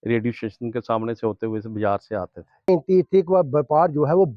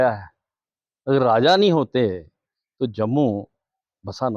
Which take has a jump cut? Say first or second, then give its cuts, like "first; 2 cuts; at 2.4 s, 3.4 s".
first; 1 cut; at 2.7 s